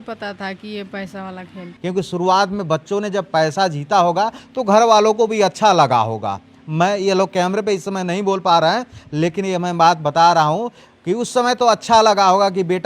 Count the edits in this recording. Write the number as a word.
one